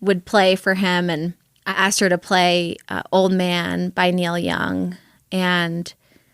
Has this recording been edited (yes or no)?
yes